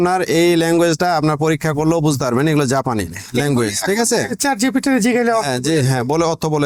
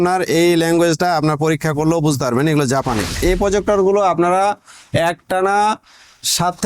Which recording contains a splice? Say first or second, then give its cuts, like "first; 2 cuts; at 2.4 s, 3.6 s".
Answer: second; 1 cut; at 3.2 s